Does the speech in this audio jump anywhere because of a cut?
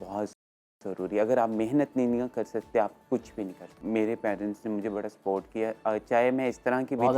yes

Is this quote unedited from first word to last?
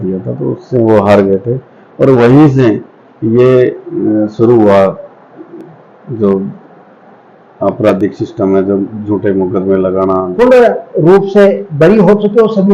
no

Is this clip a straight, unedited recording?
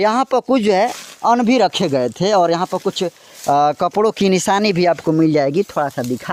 yes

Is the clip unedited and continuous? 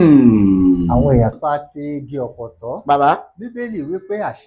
no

